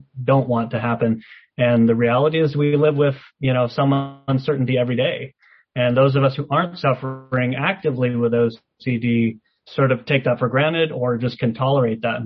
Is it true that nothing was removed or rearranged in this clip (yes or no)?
yes